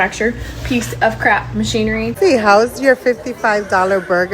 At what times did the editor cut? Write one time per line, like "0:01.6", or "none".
0:02.1